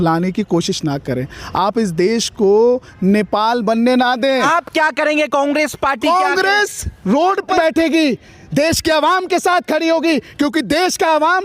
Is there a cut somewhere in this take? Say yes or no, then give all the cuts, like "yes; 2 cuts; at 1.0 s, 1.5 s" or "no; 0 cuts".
yes; 2 cuts; at 4.4 s, 7.5 s